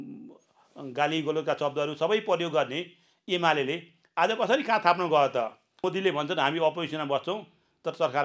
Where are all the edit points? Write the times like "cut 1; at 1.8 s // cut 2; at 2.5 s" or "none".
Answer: cut 1; at 5.8 s